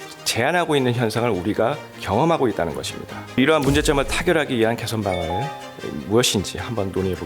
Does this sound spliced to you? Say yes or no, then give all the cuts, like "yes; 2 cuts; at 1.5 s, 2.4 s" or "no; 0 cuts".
yes; 1 cut; at 3.4 s